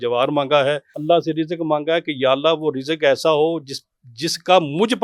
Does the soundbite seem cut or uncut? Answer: cut